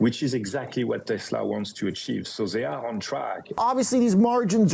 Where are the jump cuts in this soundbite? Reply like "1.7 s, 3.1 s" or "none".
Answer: 3.6 s